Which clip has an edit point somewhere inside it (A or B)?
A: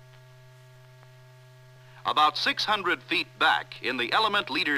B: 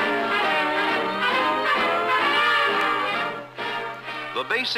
B